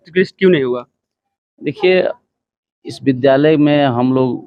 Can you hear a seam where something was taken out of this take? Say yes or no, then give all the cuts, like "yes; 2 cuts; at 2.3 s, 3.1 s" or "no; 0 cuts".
no; 0 cuts